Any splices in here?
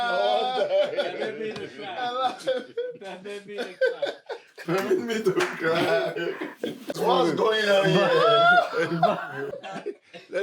yes; 1 cut; at 7.0 s

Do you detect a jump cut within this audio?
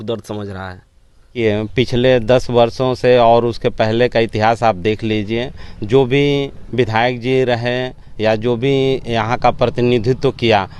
yes; 1 cut; at 1.3 s

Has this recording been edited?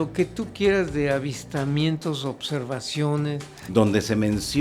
yes; 1 cut; at 3.5 s

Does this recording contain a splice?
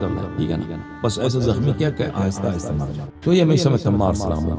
yes; 1 cut; at 3.0 s

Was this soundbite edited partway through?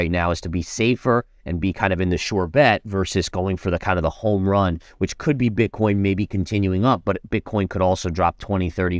no; 0 cuts

